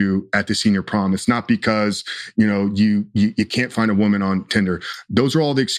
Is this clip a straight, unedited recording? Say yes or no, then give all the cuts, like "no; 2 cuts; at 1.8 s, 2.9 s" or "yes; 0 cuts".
yes; 0 cuts